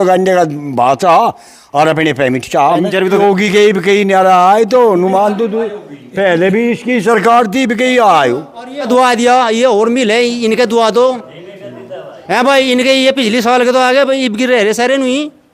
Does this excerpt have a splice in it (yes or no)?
yes